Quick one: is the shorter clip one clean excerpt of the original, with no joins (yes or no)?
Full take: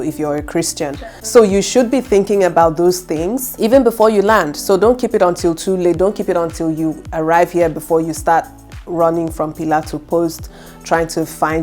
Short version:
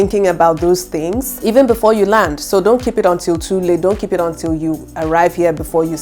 yes